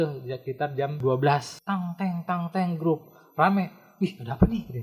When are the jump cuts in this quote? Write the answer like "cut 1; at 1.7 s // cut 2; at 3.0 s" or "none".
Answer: cut 1; at 1.0 s // cut 2; at 1.5 s